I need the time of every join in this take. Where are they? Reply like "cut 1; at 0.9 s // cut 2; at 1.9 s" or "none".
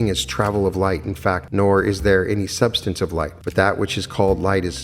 cut 1; at 1.4 s // cut 2; at 3.4 s

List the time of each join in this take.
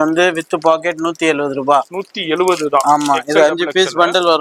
none

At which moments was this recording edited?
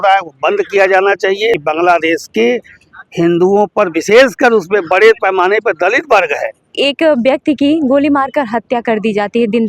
cut 1; at 1.6 s // cut 2; at 6.7 s

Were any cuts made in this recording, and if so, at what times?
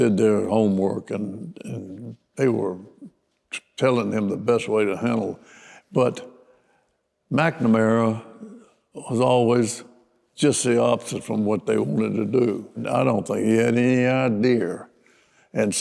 none

